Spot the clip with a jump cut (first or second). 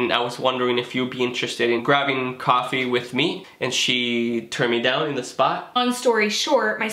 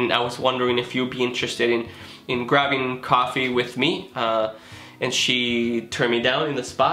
first